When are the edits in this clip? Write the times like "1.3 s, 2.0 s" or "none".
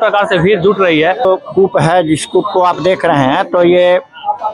1.3 s